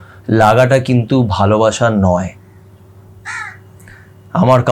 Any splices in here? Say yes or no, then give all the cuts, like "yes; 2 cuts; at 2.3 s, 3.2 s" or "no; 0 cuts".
no; 0 cuts